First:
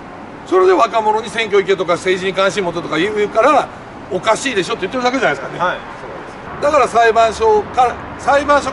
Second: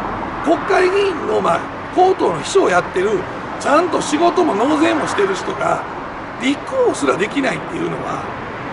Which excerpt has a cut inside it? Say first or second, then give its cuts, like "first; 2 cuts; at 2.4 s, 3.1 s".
first; 1 cut; at 6.4 s